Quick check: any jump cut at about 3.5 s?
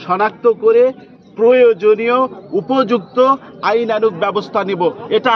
no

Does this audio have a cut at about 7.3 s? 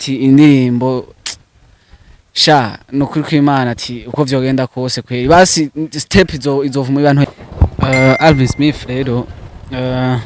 yes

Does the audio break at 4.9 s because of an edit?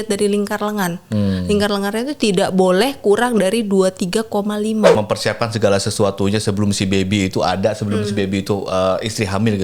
yes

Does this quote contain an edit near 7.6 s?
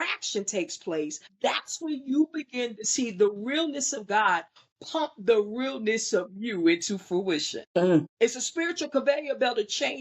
yes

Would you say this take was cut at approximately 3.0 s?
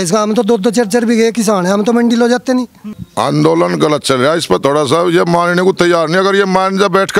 yes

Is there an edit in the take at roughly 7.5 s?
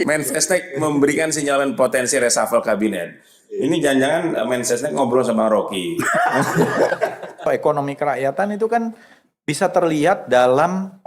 yes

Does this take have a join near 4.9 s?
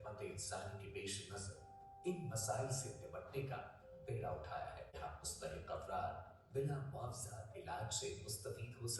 no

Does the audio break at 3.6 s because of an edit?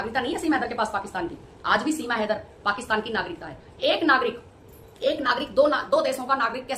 no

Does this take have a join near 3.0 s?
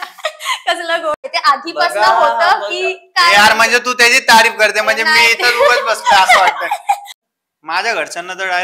no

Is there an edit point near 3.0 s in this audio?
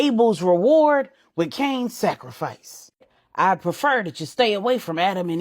yes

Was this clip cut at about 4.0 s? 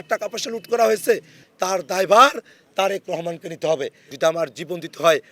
yes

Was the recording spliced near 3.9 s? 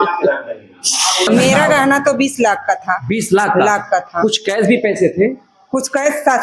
no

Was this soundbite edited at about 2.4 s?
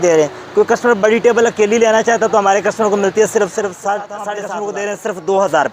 no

